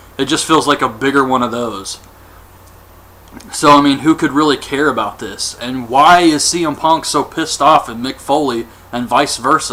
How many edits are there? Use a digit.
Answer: 0